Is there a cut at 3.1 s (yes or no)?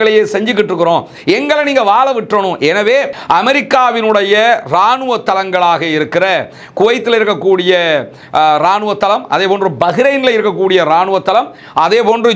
yes